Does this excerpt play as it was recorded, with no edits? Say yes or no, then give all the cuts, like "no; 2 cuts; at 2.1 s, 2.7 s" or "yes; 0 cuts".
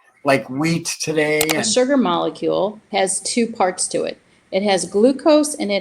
no; 2 cuts; at 1.6 s, 2.8 s